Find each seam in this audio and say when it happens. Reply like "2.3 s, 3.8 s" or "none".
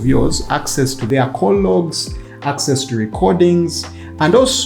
1.0 s